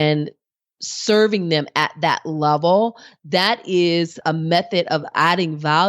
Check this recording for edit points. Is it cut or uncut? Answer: cut